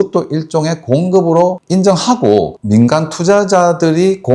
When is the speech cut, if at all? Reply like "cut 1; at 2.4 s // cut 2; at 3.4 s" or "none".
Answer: cut 1; at 2.6 s